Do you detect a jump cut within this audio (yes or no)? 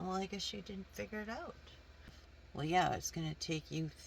yes